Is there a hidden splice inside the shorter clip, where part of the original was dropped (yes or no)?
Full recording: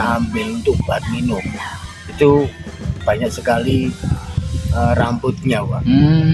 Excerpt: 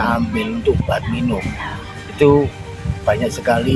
no